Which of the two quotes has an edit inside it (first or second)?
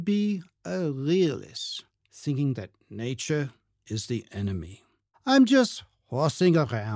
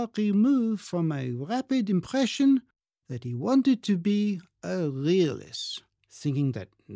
first